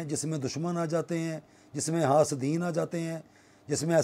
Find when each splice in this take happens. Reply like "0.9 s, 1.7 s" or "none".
none